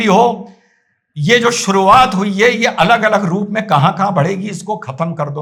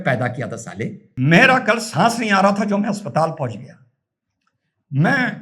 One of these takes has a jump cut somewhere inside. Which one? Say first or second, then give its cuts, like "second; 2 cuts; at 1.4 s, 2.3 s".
second; 1 cut; at 1.0 s